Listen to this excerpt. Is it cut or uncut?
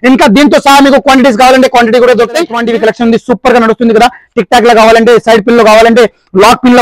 cut